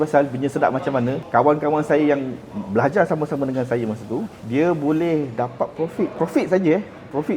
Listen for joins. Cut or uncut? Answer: cut